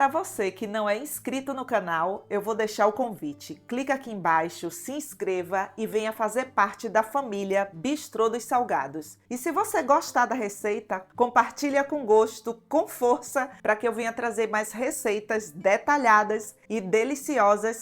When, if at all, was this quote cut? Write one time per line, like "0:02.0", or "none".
0:11.1
0:13.5